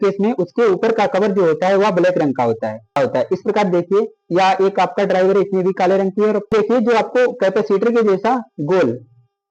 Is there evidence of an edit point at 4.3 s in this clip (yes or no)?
no